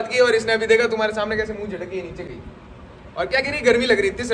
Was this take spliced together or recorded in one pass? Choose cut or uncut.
uncut